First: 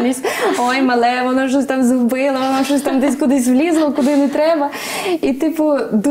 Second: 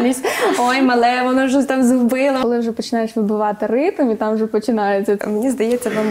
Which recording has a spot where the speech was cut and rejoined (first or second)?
second